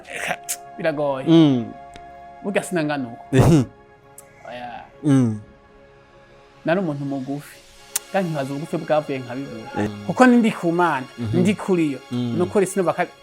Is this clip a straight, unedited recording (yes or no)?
no